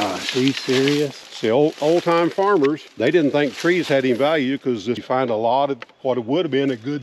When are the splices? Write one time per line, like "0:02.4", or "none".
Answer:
0:01.2
0:02.9
0:05.0

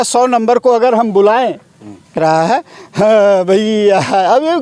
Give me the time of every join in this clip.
0:02.2

